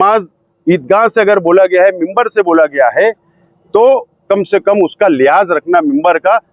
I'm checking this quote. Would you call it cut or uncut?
uncut